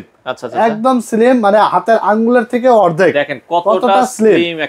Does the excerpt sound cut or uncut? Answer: uncut